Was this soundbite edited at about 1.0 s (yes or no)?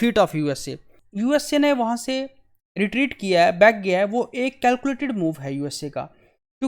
yes